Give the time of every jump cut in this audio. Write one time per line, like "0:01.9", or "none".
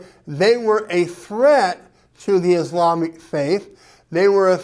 none